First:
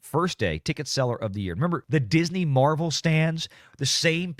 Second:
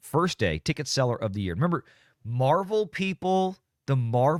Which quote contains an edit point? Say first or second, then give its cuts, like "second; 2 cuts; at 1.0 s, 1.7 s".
first; 1 cut; at 1.8 s